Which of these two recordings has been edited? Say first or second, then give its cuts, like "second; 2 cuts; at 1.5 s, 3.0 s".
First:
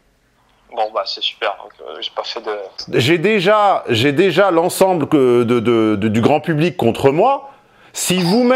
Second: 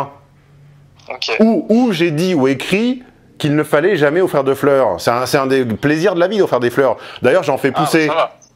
first; 1 cut; at 2.8 s